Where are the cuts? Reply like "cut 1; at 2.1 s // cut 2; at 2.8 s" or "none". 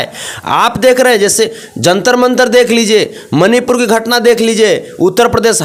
none